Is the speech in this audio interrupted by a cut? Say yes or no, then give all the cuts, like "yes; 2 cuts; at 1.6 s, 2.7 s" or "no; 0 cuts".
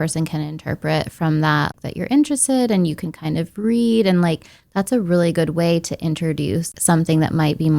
yes; 2 cuts; at 1.7 s, 6.7 s